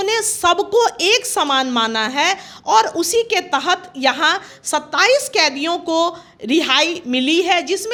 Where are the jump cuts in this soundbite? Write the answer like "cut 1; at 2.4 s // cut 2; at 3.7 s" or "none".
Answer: none